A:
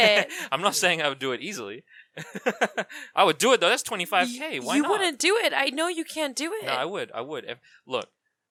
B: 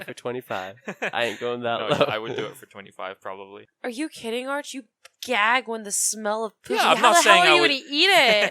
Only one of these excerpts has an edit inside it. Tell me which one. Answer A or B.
B